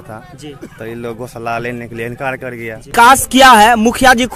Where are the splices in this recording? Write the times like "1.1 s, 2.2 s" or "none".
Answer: 2.8 s